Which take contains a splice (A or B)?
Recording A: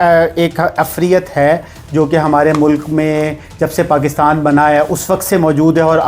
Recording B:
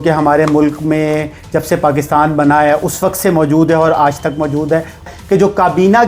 B